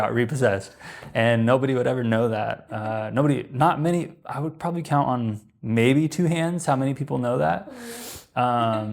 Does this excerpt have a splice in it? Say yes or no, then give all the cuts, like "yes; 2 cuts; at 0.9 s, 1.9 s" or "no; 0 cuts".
no; 0 cuts